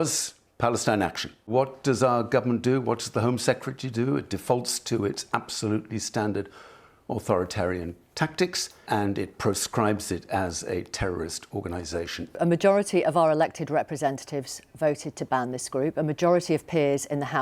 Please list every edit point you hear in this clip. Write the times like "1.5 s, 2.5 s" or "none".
1.5 s, 8.7 s, 12.4 s